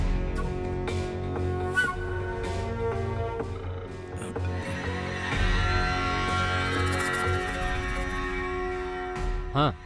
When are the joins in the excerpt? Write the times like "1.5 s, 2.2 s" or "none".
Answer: 2.4 s